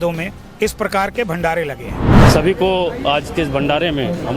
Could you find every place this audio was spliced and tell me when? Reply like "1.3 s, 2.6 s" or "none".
2.2 s